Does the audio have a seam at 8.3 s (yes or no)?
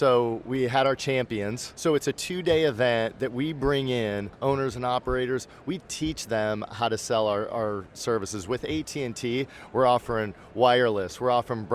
no